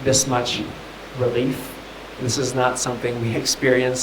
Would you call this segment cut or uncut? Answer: uncut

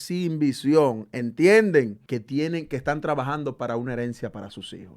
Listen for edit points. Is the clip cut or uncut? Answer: cut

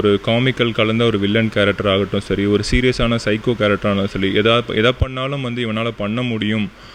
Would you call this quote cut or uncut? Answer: uncut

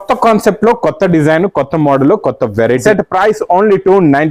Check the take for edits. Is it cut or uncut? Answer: cut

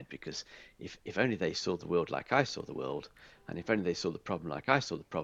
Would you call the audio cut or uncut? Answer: uncut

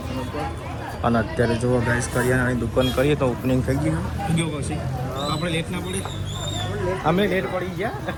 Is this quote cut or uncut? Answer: uncut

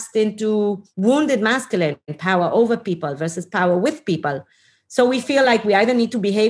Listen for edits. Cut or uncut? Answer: cut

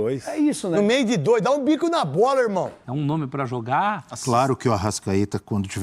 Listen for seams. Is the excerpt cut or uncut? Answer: cut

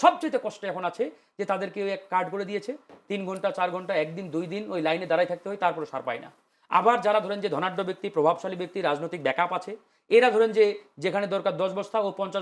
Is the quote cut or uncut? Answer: uncut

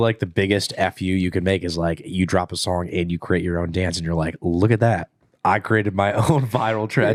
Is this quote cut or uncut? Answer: uncut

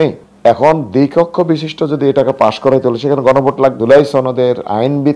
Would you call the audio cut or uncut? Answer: cut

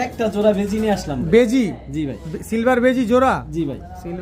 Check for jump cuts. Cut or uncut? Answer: uncut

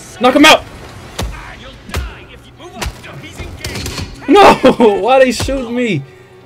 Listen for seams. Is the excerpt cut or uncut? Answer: uncut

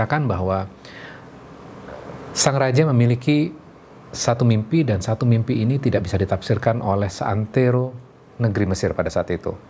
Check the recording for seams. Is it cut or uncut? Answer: uncut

